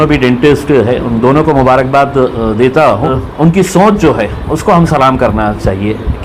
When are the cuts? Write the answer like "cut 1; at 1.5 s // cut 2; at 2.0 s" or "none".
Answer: cut 1; at 3.2 s